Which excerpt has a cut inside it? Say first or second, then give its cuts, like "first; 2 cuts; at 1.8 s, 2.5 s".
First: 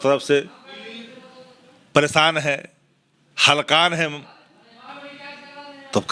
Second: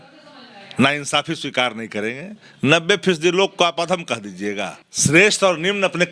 second; 1 cut; at 4.8 s